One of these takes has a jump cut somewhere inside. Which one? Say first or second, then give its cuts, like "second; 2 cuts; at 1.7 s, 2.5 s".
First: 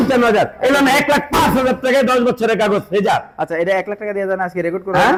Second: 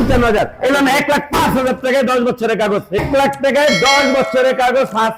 second; 1 cut; at 3.0 s